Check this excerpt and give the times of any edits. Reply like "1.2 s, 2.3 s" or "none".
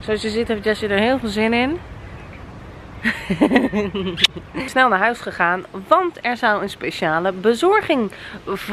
4.7 s